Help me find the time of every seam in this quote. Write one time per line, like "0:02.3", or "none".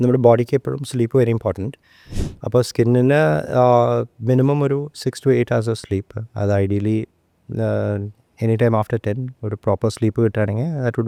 none

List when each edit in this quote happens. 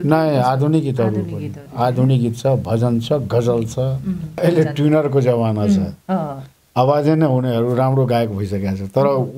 0:04.4

